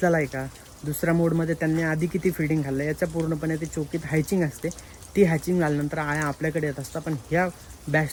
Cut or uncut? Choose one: uncut